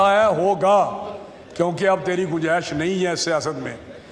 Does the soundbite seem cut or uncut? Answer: uncut